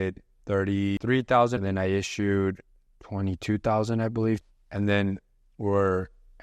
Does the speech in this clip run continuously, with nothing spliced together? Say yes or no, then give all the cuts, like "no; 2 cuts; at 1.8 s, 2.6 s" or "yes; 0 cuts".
no; 3 cuts; at 1.0 s, 1.5 s, 4.4 s